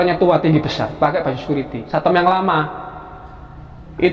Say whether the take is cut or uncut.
cut